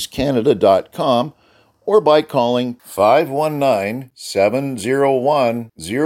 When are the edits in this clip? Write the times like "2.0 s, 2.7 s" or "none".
none